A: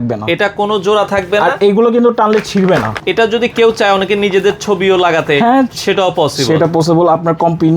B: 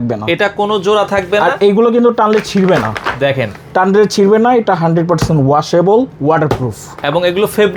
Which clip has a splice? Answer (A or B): A